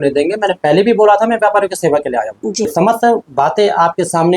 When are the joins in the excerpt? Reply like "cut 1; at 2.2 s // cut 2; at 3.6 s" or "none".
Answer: cut 1; at 2.7 s